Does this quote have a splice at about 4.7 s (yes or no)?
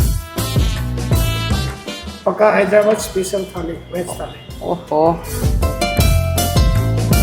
no